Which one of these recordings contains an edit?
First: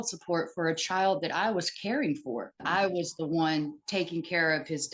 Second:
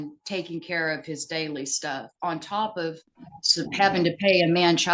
first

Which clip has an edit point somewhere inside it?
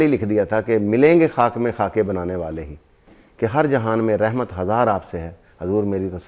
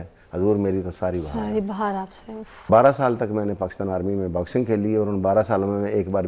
second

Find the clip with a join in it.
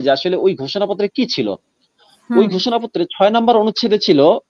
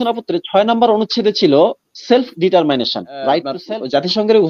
second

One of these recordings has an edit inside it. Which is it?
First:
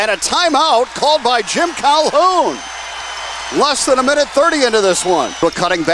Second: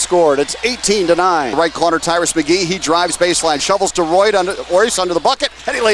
first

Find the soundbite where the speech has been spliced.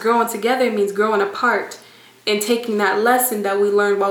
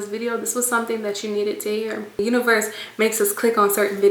second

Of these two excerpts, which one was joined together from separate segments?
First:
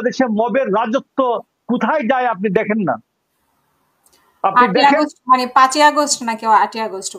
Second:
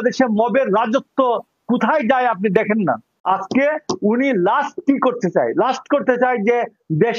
second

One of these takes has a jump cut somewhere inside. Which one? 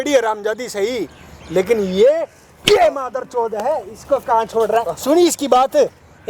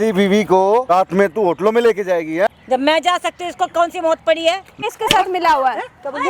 second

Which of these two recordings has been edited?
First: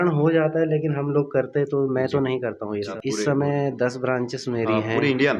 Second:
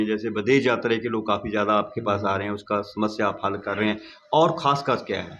first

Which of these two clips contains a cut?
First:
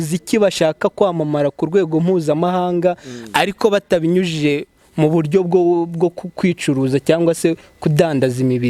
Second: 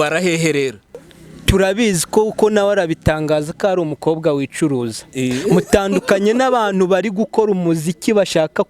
second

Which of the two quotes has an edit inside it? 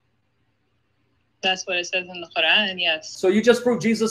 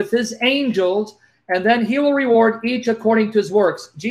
first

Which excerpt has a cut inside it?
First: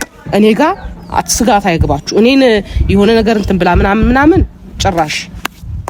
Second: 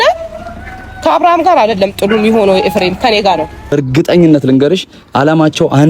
second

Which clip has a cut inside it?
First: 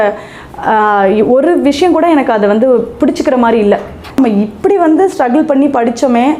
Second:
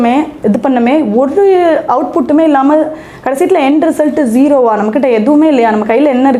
first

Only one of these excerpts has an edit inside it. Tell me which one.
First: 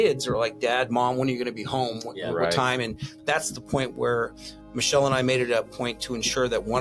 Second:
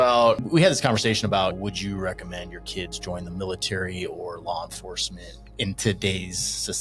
second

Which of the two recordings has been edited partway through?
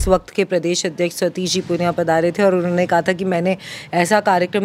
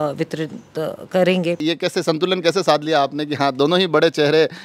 second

